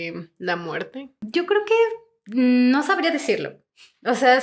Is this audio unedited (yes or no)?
no